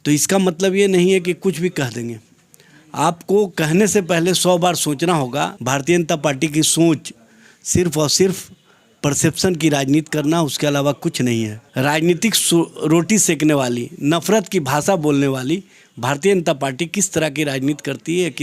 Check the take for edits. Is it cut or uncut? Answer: cut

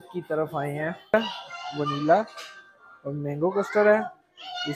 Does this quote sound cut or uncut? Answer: cut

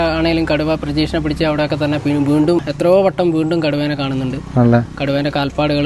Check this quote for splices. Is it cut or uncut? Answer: cut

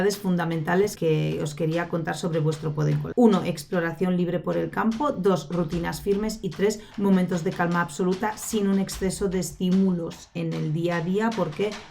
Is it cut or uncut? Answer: cut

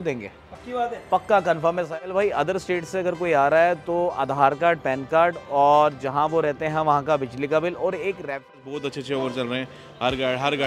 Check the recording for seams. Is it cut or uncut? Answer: cut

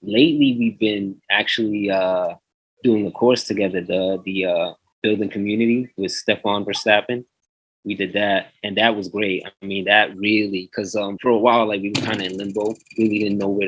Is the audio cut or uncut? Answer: cut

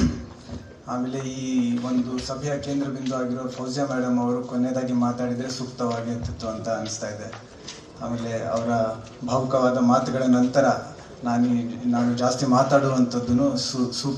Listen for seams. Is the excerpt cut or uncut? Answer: uncut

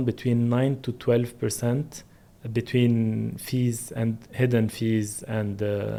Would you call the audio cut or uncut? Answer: uncut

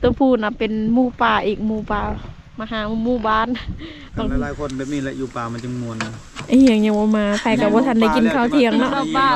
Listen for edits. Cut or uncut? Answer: cut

